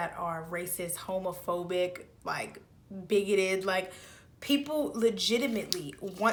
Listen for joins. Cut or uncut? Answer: uncut